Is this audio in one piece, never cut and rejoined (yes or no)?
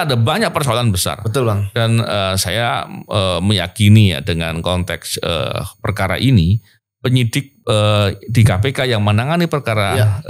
yes